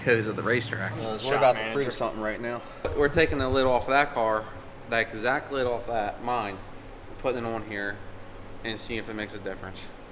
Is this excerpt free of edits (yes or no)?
no